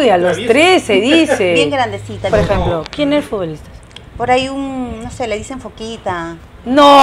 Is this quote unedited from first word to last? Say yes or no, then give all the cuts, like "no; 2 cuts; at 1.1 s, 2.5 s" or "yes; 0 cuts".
no; 1 cut; at 2.3 s